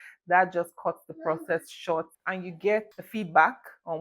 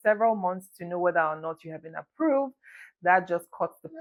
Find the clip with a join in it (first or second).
first